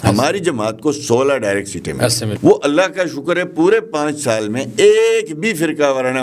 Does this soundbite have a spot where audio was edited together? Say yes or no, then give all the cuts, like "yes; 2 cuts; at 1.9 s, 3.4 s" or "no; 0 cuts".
yes; 1 cut; at 2.3 s